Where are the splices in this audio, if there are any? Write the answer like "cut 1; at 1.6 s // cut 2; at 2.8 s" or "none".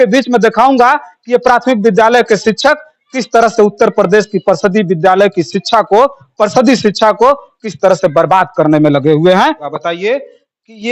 cut 1; at 9.7 s